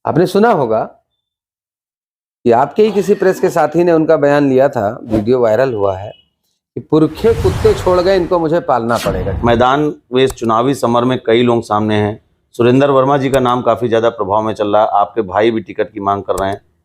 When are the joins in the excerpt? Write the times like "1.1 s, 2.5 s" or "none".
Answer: 9.3 s